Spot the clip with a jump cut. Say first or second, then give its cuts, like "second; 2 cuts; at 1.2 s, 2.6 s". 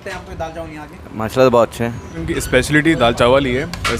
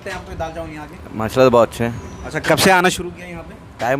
first; 1 cut; at 2.1 s